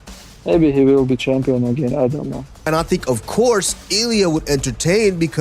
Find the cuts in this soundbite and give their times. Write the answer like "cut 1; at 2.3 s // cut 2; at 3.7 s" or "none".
cut 1; at 2.5 s